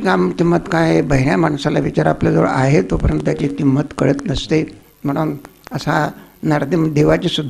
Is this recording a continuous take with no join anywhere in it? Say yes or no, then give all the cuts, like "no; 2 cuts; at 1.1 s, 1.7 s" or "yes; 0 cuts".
yes; 0 cuts